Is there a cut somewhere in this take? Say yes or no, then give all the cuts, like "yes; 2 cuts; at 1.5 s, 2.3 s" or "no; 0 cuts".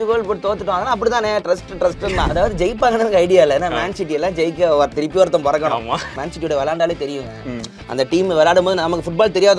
yes; 2 cuts; at 2.3 s, 6.1 s